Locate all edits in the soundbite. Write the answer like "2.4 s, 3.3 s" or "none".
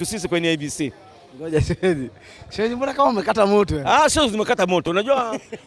none